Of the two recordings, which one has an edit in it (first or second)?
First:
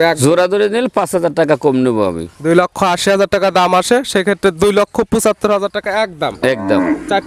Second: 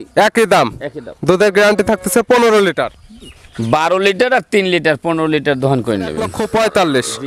second